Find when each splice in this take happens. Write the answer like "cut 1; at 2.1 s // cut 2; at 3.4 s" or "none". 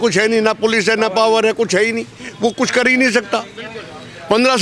none